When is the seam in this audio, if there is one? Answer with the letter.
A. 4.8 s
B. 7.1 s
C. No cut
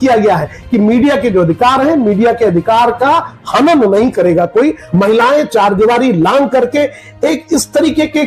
A